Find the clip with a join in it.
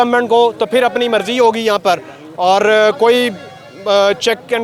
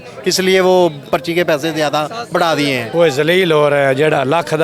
second; 1 cut; at 2.9 s

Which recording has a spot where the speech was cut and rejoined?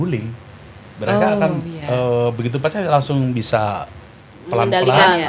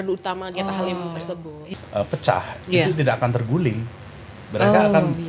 second; 1 cut; at 1.6 s

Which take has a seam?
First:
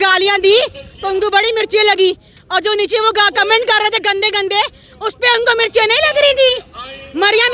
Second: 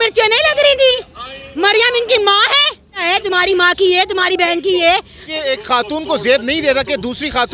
second; 2 cuts; at 3.0 s, 5.2 s

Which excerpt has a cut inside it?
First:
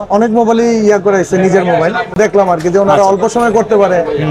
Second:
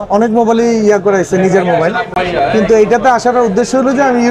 first; 1 cut; at 2.1 s

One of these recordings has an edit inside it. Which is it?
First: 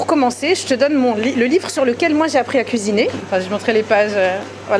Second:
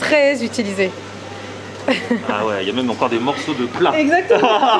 first; 1 cut; at 3.2 s

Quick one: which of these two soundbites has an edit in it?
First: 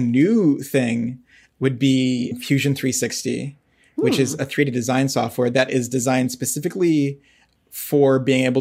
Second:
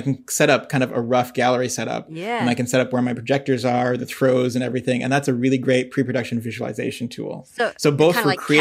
first; 1 cut; at 2.3 s

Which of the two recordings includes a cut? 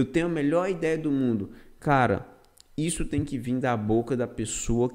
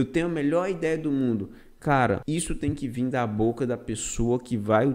second; 1 cut; at 2.2 s

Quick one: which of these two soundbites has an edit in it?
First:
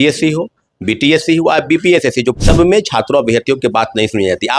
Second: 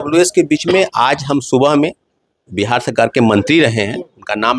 first; 1 cut; at 2.4 s

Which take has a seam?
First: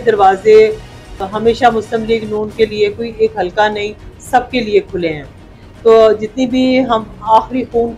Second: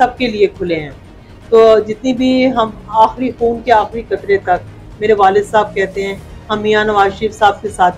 first; 1 cut; at 1.2 s

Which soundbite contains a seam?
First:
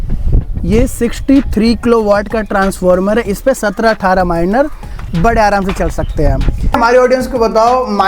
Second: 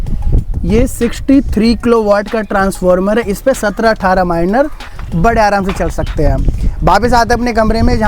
first; 1 cut; at 6.8 s

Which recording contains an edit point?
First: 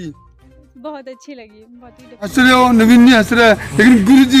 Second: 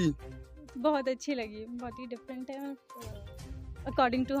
first; 1 cut; at 2.3 s

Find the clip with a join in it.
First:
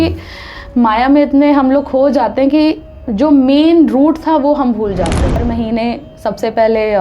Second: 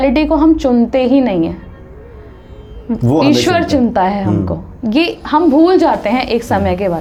first; 1 cut; at 5.4 s

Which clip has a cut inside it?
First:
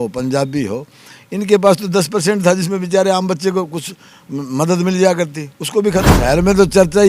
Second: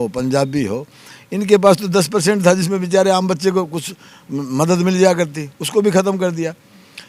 first; 1 cut; at 6.1 s

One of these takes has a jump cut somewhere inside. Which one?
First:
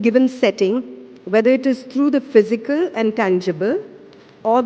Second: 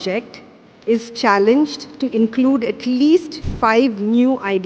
second; 1 cut; at 3.4 s

